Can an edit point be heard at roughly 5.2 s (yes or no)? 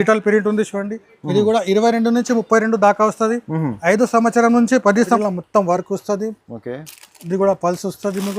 yes